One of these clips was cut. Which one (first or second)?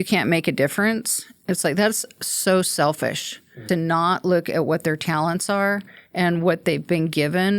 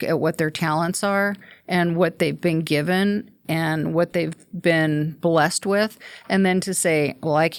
first